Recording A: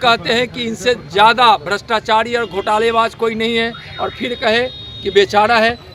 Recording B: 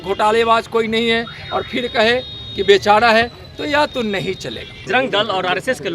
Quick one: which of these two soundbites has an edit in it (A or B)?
B